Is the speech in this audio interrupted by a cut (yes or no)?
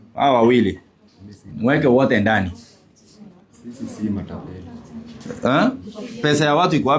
no